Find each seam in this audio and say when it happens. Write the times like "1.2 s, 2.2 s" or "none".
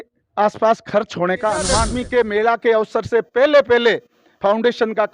1.9 s